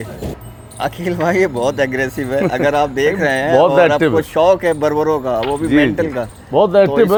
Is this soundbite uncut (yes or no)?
yes